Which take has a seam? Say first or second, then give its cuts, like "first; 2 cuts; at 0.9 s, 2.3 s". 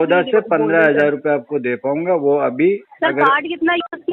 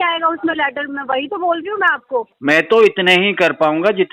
second; 1 cut; at 2.3 s